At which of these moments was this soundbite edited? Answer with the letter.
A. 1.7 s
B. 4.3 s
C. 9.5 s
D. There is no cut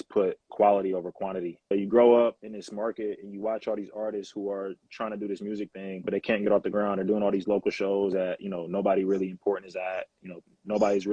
A